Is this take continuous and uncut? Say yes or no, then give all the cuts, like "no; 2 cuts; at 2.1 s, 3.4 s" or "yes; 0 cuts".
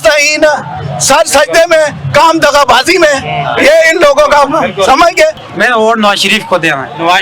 no; 1 cut; at 5.5 s